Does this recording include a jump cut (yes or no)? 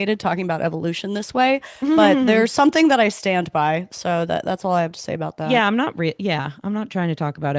no